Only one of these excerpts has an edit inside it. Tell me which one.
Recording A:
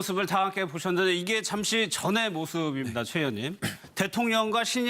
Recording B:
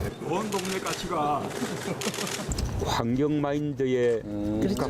B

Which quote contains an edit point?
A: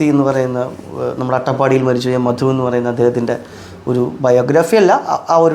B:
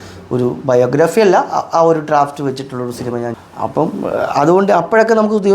B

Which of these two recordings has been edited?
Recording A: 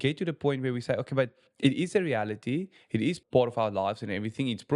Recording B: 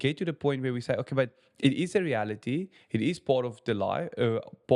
A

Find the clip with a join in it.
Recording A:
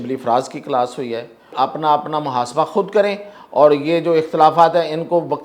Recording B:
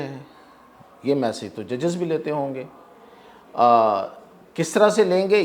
A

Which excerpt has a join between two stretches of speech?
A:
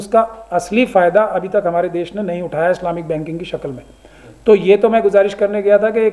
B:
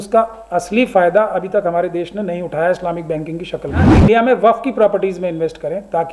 B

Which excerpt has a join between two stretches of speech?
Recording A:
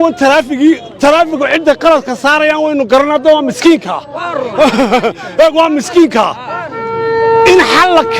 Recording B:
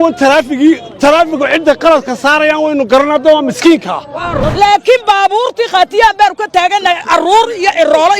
B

